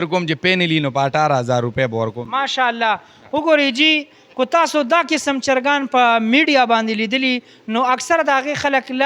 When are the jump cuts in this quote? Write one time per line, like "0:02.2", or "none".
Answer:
none